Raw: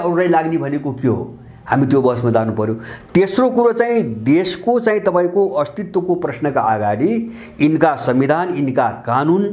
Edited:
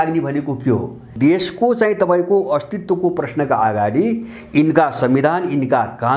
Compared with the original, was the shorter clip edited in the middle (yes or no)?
yes